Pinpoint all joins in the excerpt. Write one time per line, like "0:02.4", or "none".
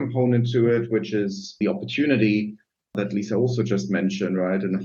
0:01.6
0:03.0